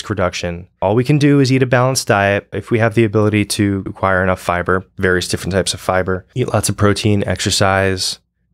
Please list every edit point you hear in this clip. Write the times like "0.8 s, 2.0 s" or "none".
0.8 s, 2.6 s, 3.9 s, 6.3 s